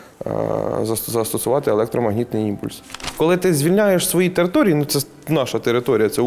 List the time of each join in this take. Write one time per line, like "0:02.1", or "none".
0:03.0